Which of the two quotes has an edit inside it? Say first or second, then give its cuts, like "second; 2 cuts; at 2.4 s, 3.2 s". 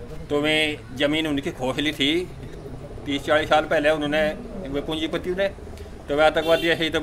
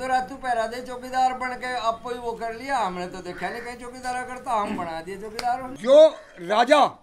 second; 1 cut; at 5.7 s